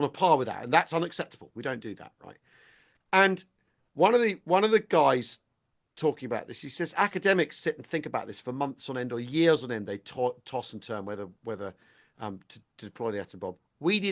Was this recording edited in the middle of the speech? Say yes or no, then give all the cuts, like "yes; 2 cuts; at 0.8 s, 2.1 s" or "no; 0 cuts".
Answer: no; 0 cuts